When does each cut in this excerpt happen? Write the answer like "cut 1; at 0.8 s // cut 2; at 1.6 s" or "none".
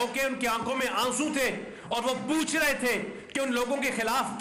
none